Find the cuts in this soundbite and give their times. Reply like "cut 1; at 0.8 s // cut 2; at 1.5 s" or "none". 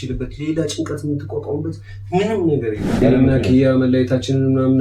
cut 1; at 3.0 s